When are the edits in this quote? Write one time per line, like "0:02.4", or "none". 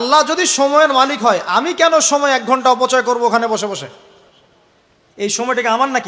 none